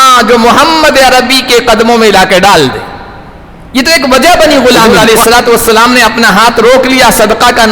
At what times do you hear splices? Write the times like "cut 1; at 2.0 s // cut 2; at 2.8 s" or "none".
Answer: cut 1; at 4.9 s